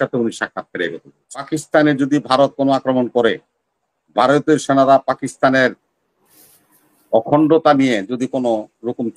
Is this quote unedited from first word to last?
no; 1 cut; at 1.5 s

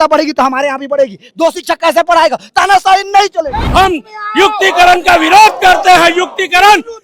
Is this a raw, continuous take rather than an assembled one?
no; 1 cut; at 3.6 s

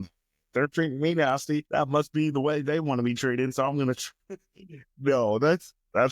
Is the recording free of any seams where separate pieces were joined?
no; 1 cut; at 1.7 s

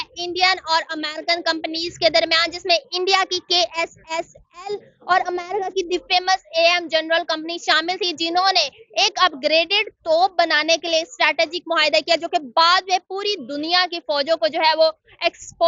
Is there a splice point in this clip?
no; 0 cuts

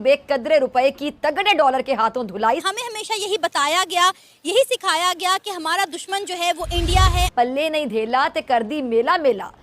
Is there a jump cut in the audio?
yes; 2 cuts; at 2.6 s, 7.3 s

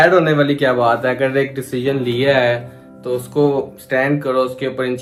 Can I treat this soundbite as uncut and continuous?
yes; 0 cuts

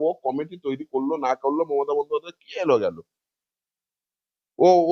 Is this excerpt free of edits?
yes; 0 cuts

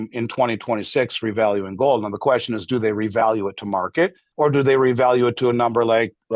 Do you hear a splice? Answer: yes; 1 cut; at 4.2 s

